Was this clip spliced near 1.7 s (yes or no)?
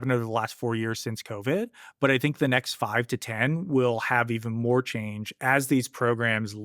no